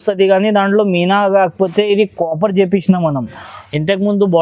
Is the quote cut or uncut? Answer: uncut